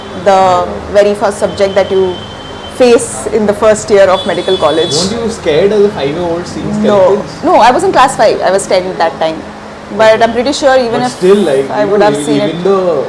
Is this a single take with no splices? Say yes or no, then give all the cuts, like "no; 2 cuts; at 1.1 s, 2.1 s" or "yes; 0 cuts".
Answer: yes; 0 cuts